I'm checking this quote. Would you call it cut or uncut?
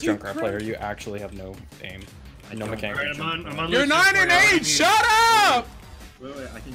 uncut